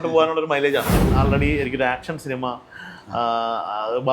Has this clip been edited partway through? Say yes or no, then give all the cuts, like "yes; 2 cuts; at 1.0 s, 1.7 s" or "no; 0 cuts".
yes; 1 cut; at 1.1 s